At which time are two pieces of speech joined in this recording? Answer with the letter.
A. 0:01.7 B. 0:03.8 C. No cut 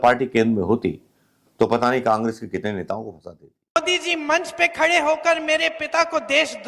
B